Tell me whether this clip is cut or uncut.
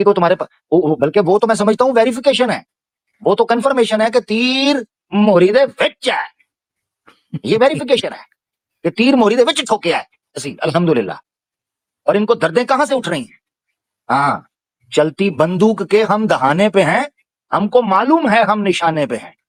uncut